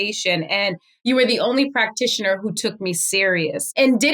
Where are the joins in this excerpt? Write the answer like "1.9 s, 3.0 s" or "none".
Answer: 0.9 s